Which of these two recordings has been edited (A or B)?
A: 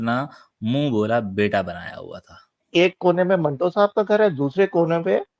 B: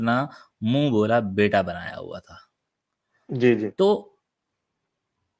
A